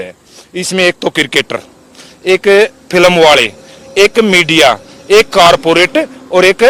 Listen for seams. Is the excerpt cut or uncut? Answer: uncut